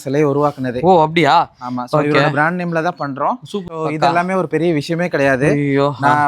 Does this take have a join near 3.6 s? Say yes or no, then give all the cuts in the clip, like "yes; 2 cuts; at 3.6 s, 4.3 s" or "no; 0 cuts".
yes; 1 cut; at 3.6 s